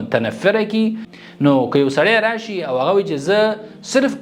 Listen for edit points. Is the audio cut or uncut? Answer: cut